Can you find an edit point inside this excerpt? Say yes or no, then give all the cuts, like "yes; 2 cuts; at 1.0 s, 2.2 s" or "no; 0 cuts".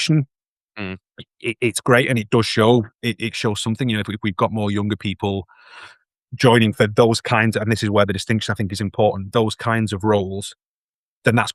no; 0 cuts